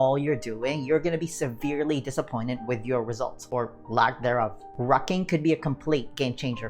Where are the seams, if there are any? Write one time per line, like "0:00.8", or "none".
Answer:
0:04.6